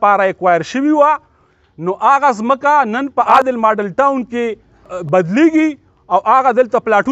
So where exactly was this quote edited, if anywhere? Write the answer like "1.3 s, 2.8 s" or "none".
3.3 s, 5.0 s